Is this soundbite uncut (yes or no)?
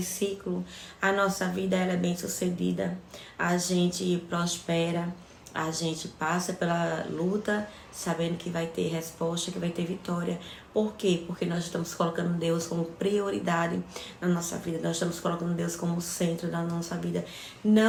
yes